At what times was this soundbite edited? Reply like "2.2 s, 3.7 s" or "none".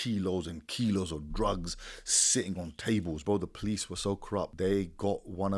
3.2 s, 4.5 s